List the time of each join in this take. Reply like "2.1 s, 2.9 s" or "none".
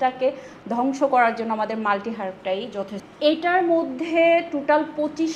3.0 s